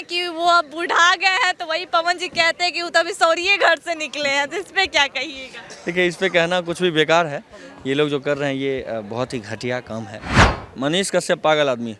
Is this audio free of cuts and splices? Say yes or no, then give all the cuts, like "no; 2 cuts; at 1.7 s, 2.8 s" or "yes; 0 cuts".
no; 1 cut; at 10.5 s